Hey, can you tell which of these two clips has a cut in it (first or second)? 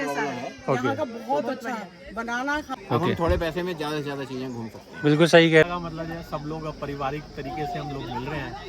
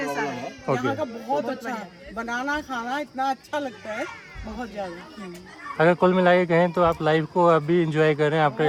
first